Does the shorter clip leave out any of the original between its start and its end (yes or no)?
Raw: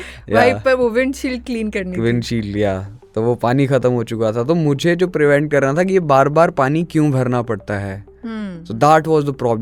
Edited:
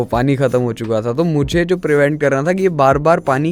no